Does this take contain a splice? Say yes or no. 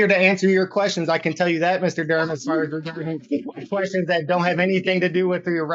no